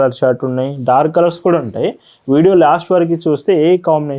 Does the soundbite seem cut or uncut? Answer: uncut